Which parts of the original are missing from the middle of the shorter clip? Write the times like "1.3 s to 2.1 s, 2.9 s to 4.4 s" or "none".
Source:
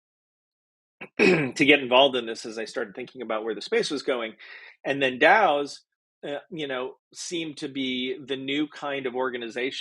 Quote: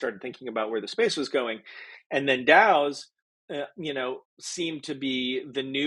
none